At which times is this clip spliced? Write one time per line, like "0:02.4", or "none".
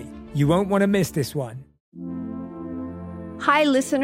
0:01.8